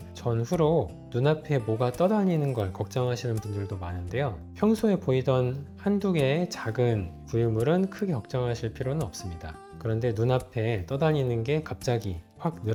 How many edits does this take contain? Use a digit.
0